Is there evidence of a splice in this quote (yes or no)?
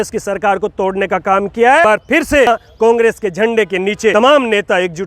yes